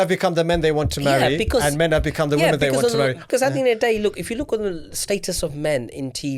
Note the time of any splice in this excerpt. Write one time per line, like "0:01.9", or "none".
0:03.2